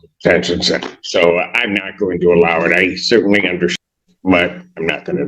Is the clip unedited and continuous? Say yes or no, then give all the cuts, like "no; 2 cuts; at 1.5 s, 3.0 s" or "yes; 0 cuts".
no; 1 cut; at 3.8 s